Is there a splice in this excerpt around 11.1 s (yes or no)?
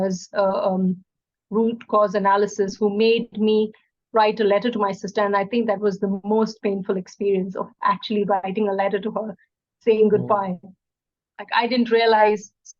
no